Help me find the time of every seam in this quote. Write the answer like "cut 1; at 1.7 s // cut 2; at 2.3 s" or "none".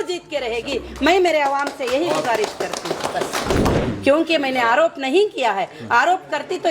cut 1; at 3.8 s